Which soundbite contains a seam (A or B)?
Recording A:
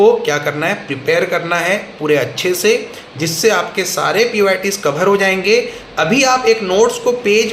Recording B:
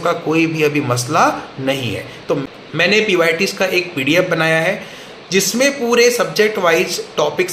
B